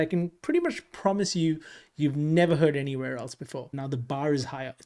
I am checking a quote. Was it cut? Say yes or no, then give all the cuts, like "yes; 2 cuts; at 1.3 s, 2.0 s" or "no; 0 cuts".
yes; 1 cut; at 3.7 s